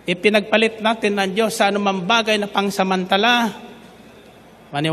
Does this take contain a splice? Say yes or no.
no